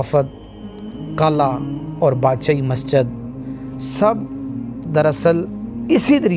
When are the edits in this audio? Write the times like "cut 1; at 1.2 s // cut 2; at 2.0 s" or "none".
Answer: none